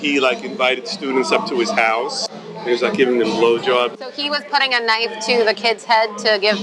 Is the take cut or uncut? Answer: cut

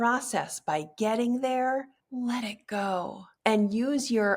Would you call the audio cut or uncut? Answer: uncut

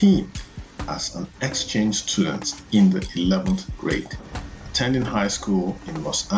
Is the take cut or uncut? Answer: uncut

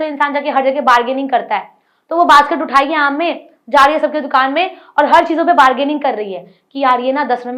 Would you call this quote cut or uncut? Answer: uncut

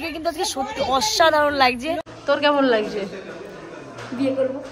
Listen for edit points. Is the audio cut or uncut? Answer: cut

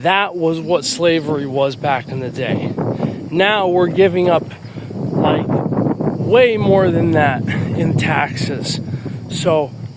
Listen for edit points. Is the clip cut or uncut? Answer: uncut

